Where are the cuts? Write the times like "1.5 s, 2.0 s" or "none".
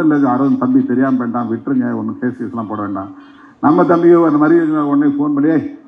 none